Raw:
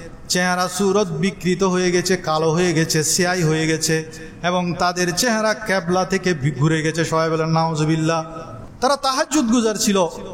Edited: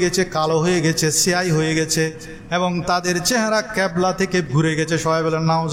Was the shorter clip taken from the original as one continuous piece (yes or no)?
no